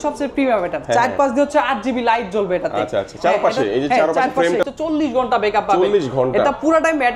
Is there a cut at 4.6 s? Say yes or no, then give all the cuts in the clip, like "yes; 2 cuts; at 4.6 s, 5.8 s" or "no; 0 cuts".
yes; 1 cut; at 4.6 s